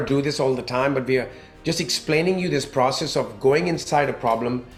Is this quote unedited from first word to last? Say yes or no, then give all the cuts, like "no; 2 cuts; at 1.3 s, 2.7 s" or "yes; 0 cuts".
yes; 0 cuts